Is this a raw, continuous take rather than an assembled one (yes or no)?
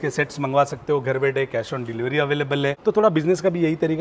no